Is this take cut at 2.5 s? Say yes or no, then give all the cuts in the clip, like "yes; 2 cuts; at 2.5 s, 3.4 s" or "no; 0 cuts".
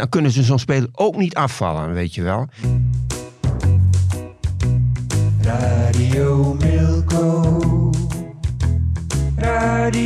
yes; 1 cut; at 2.5 s